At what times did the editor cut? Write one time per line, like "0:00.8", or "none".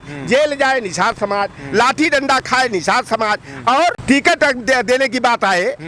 0:04.0